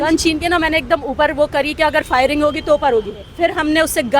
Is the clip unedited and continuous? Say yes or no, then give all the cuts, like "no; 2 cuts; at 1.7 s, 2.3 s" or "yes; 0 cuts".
no; 1 cut; at 3.2 s